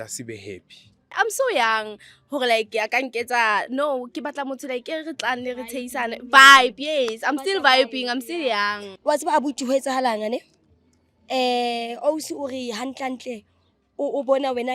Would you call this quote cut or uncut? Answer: cut